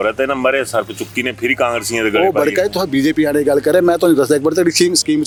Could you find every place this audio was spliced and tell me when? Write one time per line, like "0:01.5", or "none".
none